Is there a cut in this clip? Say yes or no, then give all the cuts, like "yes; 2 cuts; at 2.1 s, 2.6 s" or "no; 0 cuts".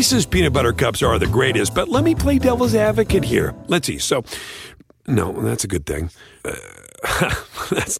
no; 0 cuts